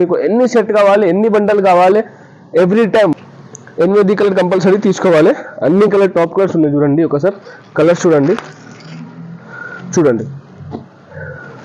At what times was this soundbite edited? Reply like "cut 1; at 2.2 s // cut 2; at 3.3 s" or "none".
cut 1; at 3.1 s